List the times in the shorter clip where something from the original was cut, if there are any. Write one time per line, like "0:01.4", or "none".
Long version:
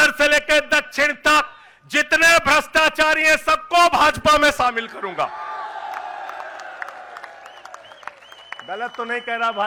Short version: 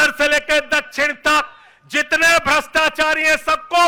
none